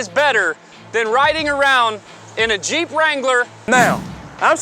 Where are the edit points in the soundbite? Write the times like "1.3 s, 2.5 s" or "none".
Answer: 3.5 s